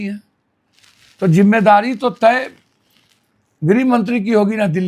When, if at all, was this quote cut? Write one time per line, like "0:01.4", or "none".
none